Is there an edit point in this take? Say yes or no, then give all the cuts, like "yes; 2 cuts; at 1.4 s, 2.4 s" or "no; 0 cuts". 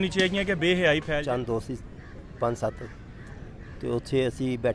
yes; 1 cut; at 1.2 s